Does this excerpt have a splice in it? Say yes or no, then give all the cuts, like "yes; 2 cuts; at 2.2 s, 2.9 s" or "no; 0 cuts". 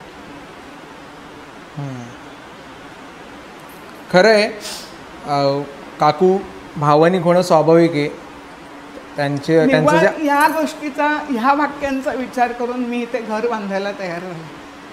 no; 0 cuts